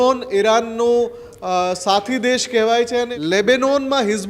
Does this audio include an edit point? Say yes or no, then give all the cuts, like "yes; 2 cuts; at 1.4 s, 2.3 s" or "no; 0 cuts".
yes; 1 cut; at 3.1 s